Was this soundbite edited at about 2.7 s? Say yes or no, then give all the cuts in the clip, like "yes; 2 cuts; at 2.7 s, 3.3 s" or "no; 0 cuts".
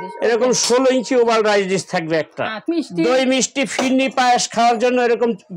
yes; 1 cut; at 2.7 s